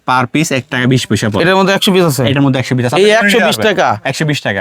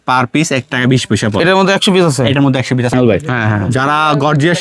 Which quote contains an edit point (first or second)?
second